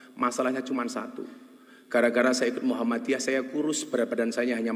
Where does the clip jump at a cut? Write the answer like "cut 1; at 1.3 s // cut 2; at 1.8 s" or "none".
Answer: none